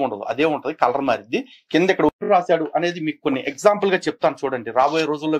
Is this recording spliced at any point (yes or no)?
yes